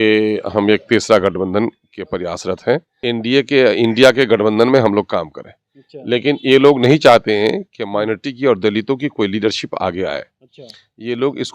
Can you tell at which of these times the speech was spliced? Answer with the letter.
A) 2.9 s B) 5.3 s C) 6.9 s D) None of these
A